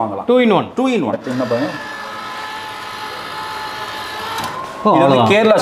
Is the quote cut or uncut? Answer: cut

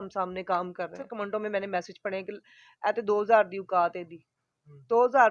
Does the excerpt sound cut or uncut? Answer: cut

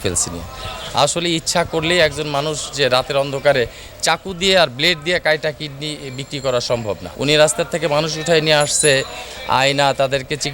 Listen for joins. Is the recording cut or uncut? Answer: cut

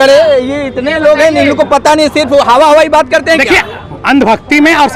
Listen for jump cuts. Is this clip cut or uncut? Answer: uncut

